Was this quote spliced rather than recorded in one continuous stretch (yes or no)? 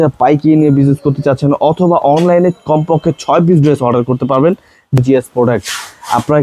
yes